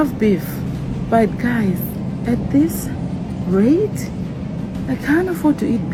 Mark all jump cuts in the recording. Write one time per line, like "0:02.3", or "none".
none